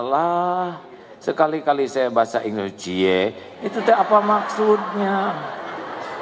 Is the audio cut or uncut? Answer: uncut